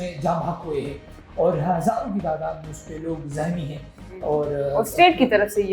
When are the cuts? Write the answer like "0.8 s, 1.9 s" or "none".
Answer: none